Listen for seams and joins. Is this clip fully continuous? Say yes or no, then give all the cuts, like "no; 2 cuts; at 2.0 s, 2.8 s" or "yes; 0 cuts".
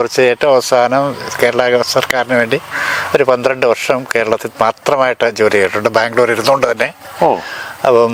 yes; 0 cuts